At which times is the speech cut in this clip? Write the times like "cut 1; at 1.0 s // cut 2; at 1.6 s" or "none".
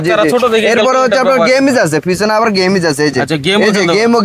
none